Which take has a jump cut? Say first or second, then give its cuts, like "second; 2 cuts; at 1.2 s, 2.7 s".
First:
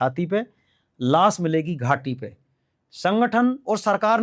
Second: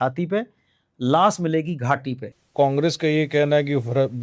second; 1 cut; at 2.4 s